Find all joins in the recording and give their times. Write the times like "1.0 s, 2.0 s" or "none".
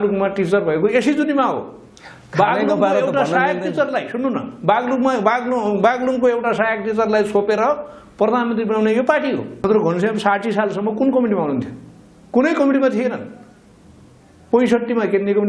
9.6 s